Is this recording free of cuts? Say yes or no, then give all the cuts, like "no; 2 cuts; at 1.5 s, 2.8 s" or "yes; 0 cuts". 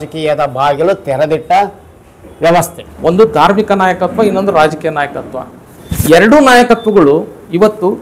no; 1 cut; at 2.8 s